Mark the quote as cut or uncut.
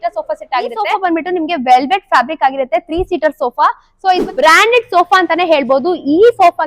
cut